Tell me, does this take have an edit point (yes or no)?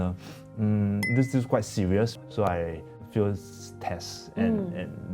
yes